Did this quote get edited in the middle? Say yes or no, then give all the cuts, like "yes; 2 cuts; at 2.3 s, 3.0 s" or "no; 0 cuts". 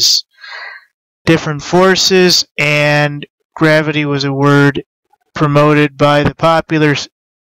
no; 0 cuts